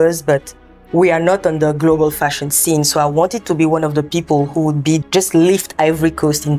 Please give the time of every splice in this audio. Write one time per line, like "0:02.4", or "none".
0:05.0